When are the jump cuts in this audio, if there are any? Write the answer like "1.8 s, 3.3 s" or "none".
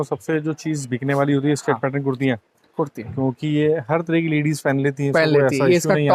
none

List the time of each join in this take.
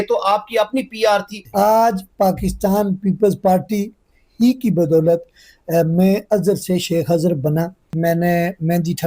1.4 s, 7.8 s

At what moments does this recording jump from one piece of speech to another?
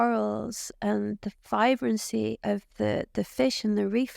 2.4 s

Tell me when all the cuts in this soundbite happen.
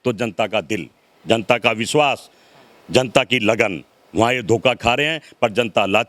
none

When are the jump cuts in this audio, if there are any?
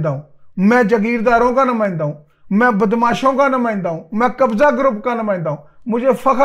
none

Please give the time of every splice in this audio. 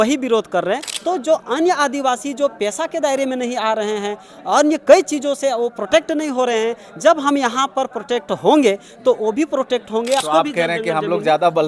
0.9 s, 10.2 s

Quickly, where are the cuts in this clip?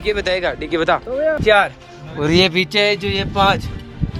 1.4 s

